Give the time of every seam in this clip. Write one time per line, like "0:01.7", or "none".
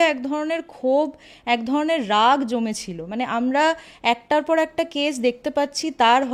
none